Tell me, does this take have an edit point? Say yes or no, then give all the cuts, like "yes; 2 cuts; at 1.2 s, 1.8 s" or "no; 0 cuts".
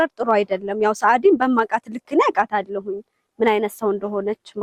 no; 0 cuts